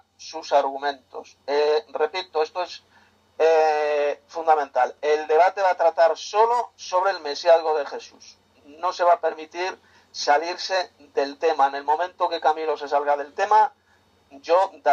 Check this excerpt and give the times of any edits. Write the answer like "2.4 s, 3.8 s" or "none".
none

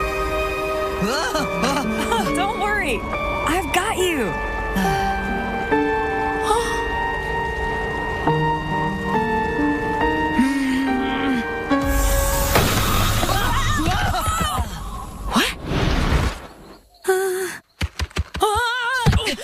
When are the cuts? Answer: 4.4 s

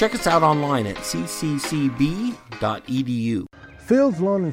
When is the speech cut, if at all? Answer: 3.5 s

